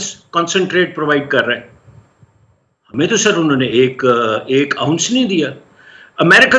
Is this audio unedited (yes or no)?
yes